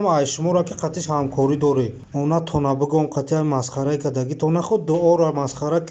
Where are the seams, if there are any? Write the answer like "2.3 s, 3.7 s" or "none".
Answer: none